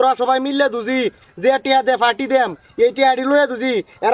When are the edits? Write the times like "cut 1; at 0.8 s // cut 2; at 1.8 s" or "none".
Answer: none